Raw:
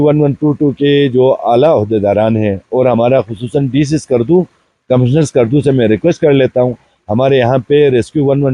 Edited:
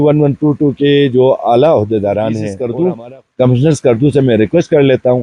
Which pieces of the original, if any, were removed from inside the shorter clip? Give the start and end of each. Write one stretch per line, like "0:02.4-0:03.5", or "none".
0:02.5-0:04.0